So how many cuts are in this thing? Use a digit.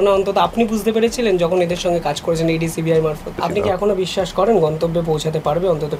1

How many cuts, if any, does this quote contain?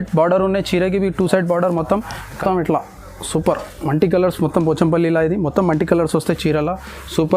1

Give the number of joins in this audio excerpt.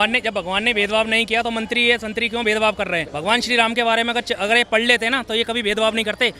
1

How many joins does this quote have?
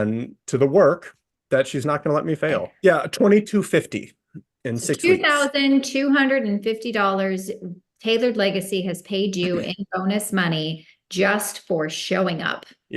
1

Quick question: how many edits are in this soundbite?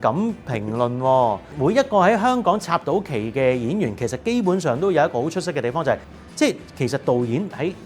2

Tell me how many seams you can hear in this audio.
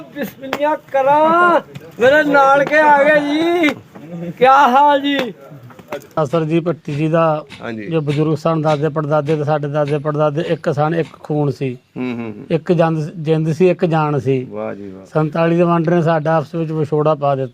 1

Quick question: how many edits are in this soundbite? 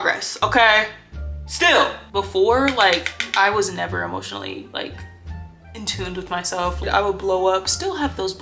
2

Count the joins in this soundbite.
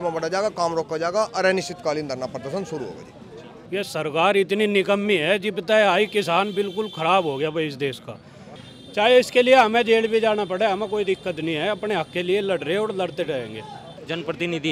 3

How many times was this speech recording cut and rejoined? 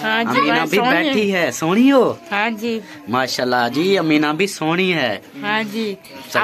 0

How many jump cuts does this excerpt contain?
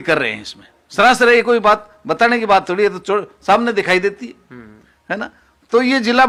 0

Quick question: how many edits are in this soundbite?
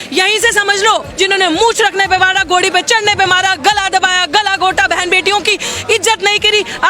1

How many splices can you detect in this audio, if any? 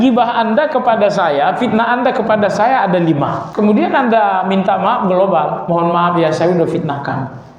1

